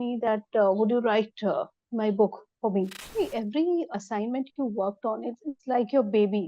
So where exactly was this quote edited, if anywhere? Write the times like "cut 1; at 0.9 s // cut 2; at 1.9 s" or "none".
cut 1; at 3.0 s // cut 2; at 3.9 s // cut 3; at 5.5 s